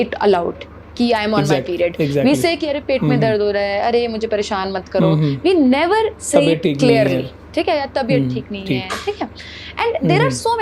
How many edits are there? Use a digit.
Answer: 0